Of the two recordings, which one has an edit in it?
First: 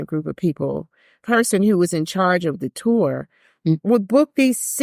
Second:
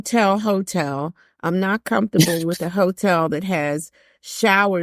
first; 2 cuts; at 1.2 s, 3.8 s

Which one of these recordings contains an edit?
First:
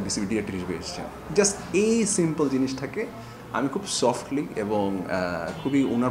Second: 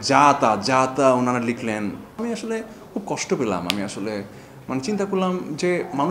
second; 1 cut; at 2.2 s

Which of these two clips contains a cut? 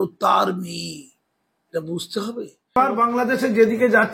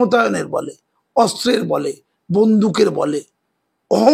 first; 1 cut; at 2.8 s

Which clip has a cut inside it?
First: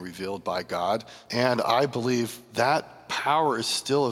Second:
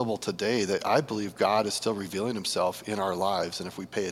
first; 3 cuts; at 1.2 s, 2.4 s, 3.0 s

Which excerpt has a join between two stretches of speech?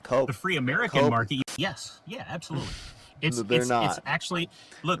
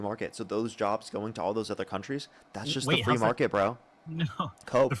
first; 1 cut; at 1.4 s

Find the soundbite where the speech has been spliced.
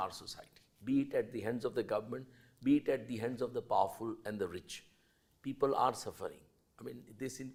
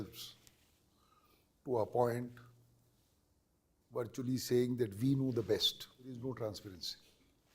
second; 1 cut; at 6.1 s

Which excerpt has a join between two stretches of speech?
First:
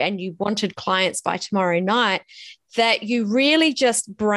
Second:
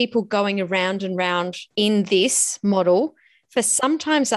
second; 1 cut; at 1.6 s

